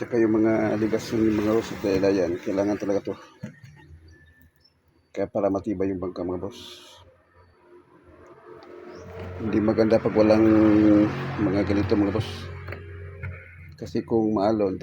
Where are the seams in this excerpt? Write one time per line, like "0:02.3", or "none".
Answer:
none